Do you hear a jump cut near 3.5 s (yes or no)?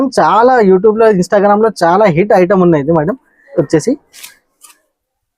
yes